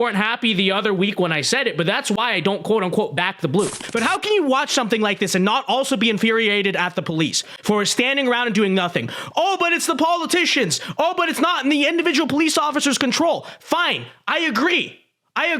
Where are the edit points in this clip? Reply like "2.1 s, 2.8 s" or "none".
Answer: 3.8 s